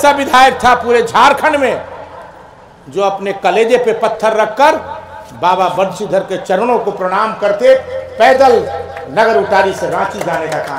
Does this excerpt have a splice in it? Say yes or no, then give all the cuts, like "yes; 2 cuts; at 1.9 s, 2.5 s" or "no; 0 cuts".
no; 0 cuts